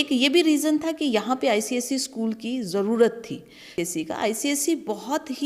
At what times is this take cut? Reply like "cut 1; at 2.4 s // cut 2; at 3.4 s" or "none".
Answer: cut 1; at 3.7 s